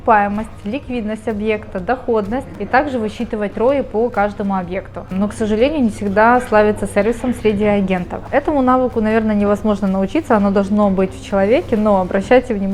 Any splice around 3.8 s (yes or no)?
no